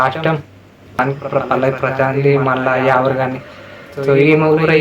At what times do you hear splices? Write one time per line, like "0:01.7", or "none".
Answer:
0:01.0

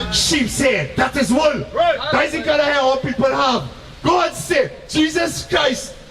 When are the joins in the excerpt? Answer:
none

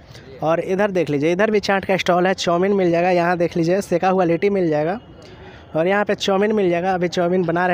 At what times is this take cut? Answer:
none

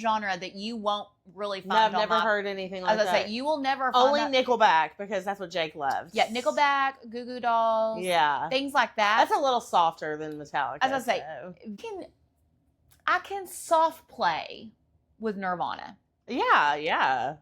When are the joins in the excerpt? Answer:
0:11.8

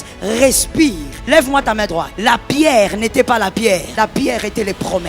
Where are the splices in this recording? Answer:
0:01.1
0:02.1
0:03.9

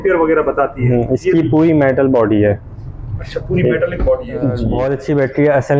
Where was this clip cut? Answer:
0:04.7

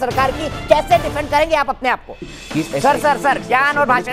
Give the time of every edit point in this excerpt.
0:02.3

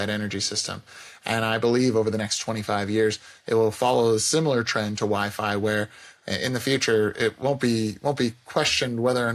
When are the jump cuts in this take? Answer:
none

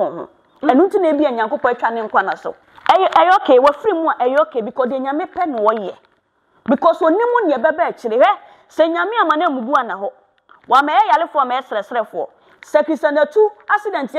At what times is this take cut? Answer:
0:02.5

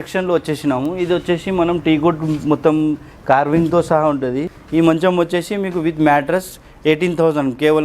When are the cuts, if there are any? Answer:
0:04.5

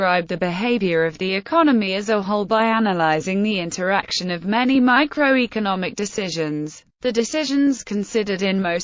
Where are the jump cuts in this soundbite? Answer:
0:05.3

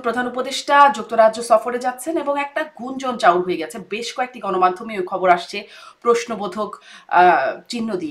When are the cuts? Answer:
none

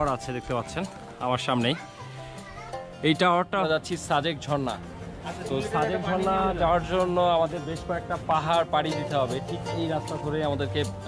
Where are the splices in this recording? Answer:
0:03.6

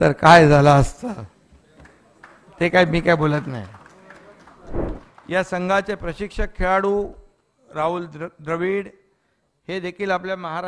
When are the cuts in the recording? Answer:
0:04.8

